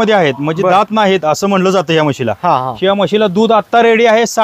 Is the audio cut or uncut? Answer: uncut